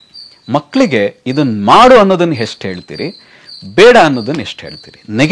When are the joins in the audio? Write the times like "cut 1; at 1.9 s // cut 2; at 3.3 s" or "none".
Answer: none